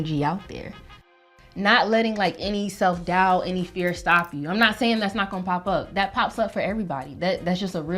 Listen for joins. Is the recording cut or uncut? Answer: cut